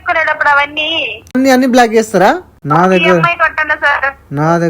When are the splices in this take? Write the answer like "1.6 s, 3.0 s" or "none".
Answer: 1.4 s, 2.5 s

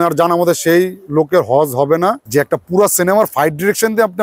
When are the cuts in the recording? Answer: 2.2 s

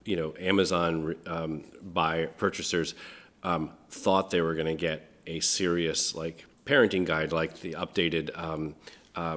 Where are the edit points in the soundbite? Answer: 6.5 s

